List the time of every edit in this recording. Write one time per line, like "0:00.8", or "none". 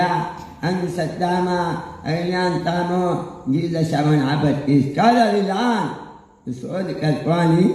none